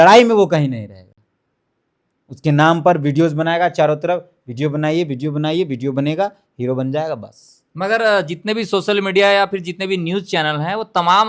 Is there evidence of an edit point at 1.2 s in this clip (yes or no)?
no